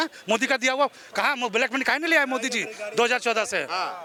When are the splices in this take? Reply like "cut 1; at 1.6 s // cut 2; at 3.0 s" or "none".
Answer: none